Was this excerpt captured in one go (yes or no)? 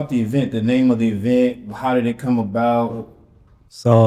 yes